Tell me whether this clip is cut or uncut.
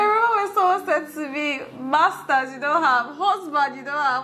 uncut